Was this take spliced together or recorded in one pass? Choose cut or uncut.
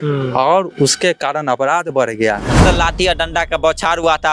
cut